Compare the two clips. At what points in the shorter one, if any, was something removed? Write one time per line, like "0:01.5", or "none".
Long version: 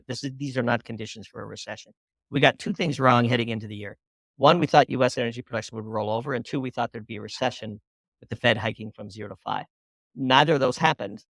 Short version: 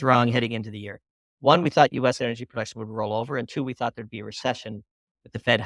none